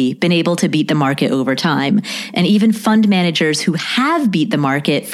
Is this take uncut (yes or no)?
yes